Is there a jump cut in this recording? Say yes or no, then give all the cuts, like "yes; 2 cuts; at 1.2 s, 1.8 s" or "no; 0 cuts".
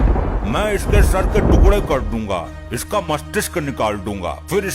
no; 0 cuts